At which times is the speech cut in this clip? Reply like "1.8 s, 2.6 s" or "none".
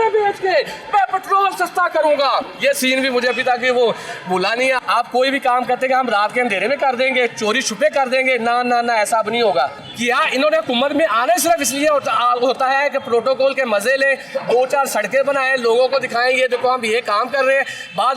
2.5 s, 4.8 s, 9.8 s